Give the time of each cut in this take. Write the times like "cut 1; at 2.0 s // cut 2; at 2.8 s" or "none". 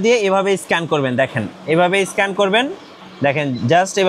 none